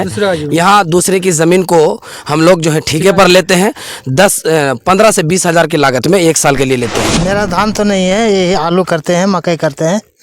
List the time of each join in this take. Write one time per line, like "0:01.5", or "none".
0:07.1